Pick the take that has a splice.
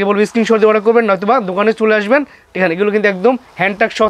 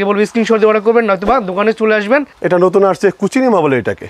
second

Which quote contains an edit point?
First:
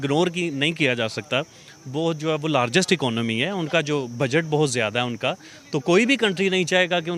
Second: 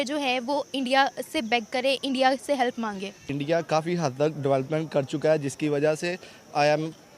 second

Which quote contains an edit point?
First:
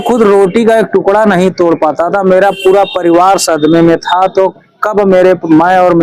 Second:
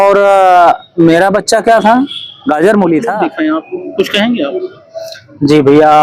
second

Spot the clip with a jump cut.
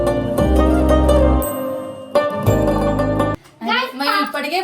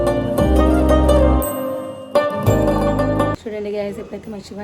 second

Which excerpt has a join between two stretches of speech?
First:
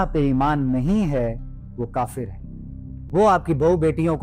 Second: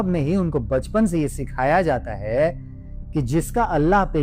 first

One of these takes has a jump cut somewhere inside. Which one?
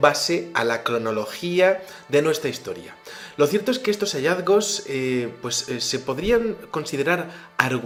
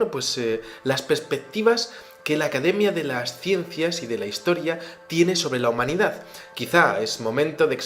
second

